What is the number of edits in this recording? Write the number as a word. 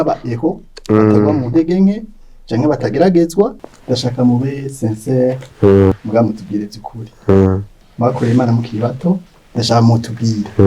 three